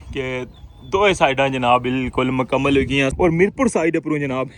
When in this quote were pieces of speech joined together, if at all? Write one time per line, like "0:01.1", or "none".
0:03.1